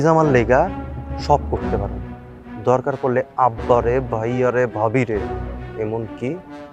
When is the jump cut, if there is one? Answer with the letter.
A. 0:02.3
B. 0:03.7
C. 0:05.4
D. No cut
D